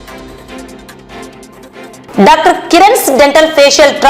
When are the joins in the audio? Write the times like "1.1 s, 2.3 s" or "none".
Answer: 1.2 s

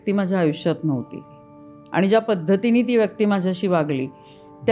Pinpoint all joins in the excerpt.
none

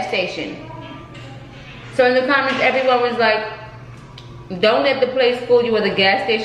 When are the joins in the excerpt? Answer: none

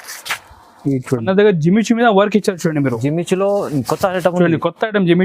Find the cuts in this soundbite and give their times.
1.2 s

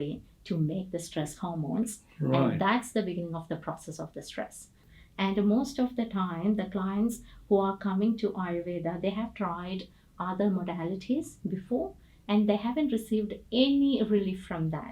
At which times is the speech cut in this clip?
4.8 s

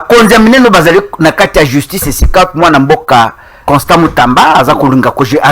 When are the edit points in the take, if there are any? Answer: 3.5 s

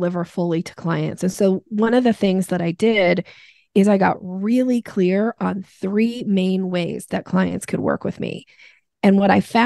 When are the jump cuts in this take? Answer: none

